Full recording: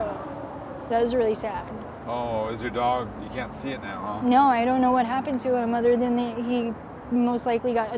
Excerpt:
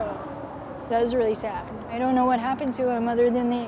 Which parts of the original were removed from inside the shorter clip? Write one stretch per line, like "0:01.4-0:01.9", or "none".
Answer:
0:02.0-0:04.6